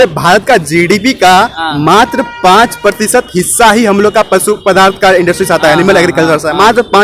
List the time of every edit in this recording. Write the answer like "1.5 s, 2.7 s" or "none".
none